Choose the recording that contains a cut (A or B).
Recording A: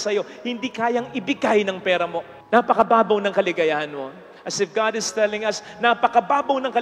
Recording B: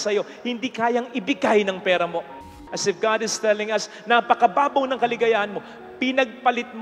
B